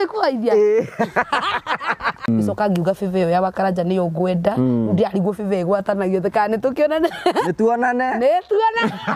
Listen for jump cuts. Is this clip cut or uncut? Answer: cut